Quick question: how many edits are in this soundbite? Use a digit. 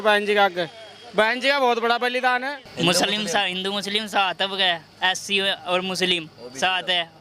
1